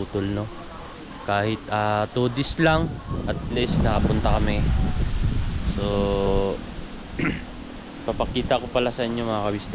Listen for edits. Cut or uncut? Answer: uncut